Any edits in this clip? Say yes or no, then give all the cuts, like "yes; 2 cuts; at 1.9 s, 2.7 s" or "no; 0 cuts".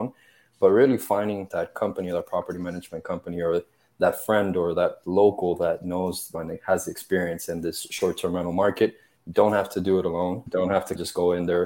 yes; 1 cut; at 1.5 s